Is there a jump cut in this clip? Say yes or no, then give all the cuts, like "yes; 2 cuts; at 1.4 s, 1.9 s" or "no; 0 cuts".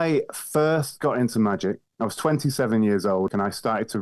yes; 2 cuts; at 1.9 s, 3.3 s